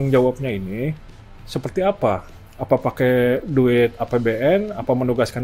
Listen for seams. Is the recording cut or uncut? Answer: uncut